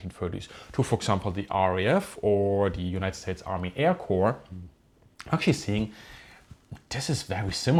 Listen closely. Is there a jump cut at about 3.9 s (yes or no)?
no